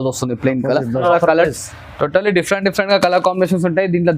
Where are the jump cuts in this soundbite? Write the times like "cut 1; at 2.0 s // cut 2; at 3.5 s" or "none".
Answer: cut 1; at 1.0 s